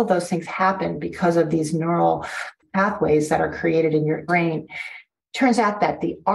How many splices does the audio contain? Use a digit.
2